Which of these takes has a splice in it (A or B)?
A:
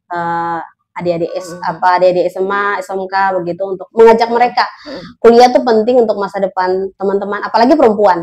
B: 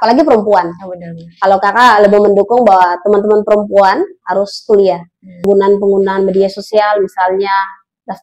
B